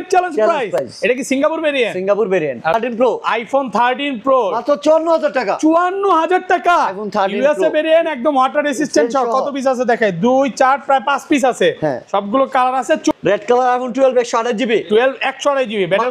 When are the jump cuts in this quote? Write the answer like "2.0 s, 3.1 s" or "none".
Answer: 2.7 s, 13.1 s